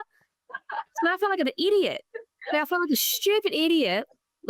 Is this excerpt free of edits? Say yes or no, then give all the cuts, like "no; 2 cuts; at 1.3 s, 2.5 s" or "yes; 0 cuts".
yes; 0 cuts